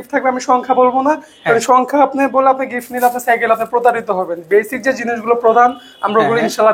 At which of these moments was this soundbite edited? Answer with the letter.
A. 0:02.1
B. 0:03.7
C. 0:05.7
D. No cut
D